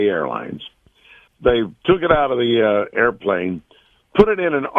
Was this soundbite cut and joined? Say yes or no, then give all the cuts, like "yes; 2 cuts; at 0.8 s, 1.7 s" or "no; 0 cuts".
yes; 1 cut; at 1.3 s